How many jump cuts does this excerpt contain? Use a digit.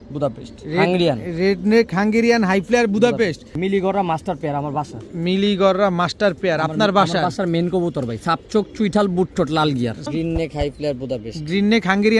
2